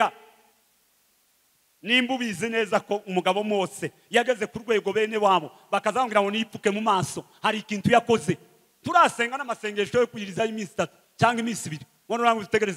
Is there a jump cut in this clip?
no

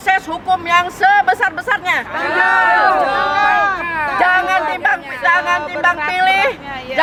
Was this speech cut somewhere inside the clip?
no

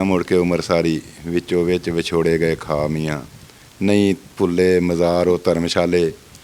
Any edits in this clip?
no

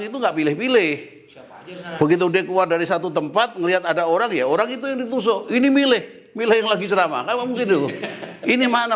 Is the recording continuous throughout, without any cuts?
yes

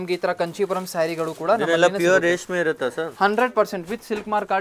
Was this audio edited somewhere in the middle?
no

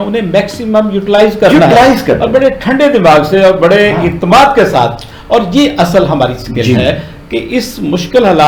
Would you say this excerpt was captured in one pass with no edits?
yes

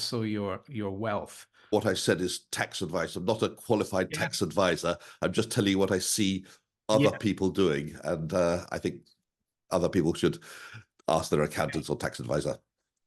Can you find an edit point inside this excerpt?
yes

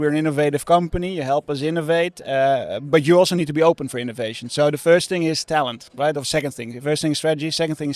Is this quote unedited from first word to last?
yes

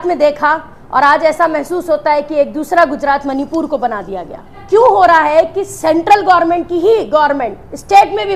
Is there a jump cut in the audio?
yes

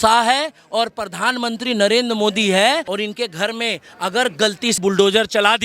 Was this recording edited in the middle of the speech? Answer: yes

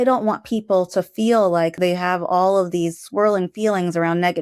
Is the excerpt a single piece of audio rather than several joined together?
no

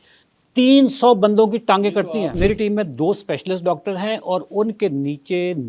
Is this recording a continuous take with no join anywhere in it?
no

